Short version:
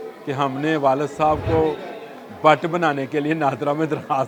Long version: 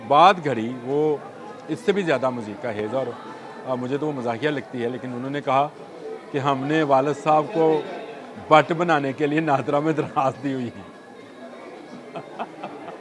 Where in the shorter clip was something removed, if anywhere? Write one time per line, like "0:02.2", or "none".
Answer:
none